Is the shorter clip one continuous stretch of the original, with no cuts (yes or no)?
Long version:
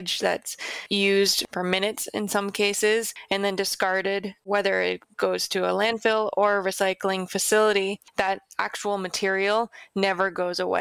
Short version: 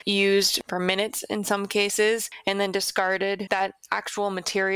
no